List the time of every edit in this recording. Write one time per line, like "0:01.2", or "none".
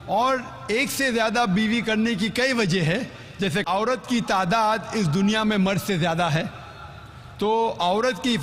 0:05.0